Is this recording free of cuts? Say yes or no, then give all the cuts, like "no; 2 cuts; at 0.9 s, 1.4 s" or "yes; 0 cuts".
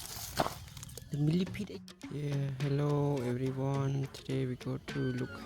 no; 1 cut; at 1.6 s